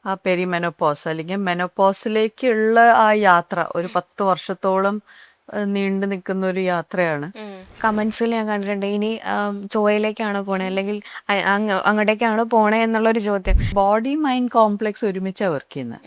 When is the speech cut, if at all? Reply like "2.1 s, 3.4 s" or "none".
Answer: 7.8 s, 13.7 s

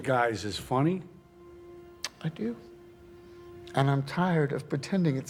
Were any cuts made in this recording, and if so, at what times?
none

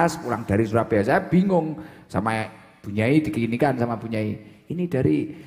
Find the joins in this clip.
none

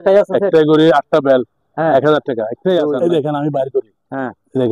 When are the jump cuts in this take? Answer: 2.8 s

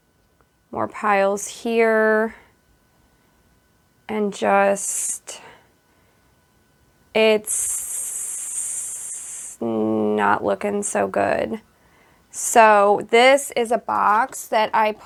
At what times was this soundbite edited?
none

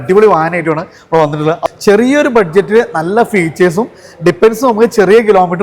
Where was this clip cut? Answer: 1.6 s

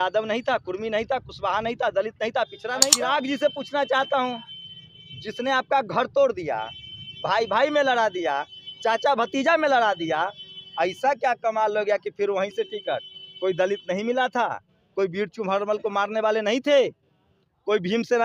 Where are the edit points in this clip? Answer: 2.9 s

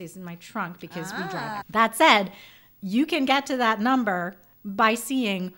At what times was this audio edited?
1.6 s

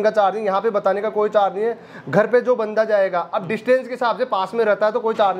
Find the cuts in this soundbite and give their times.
none

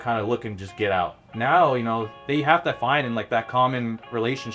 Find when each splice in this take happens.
2.2 s

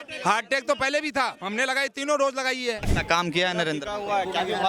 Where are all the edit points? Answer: 2.9 s

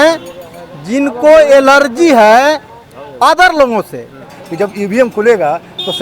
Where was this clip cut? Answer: 4.4 s

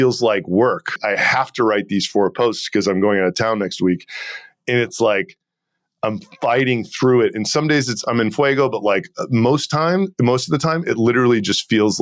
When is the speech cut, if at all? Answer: 1.0 s

